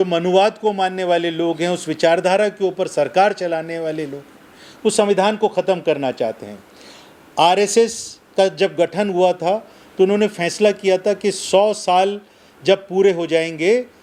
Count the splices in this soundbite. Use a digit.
0